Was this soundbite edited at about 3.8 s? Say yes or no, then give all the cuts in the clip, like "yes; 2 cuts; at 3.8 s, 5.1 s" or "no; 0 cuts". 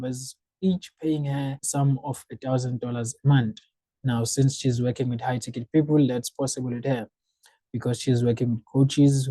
no; 0 cuts